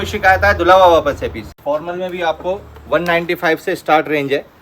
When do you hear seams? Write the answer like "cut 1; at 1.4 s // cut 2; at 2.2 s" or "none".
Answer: cut 1; at 1.5 s